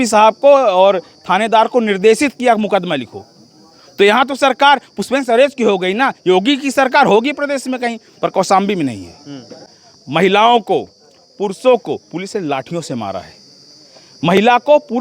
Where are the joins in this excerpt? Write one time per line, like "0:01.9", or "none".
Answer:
0:09.7